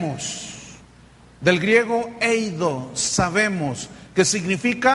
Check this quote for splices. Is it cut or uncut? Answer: uncut